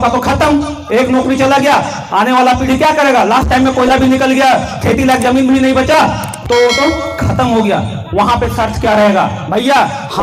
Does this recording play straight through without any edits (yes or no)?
yes